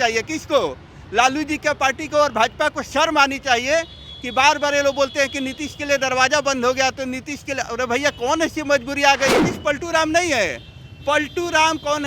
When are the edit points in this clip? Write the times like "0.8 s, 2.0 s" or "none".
9.4 s